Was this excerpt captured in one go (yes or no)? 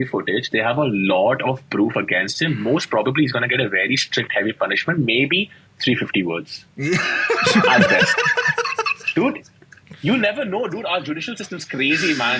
yes